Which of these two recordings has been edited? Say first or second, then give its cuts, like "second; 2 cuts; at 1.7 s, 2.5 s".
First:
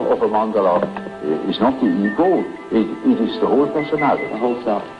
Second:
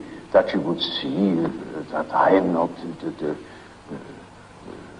first; 1 cut; at 3.6 s